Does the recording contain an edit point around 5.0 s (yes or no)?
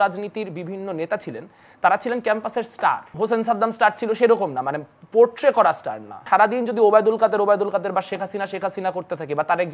no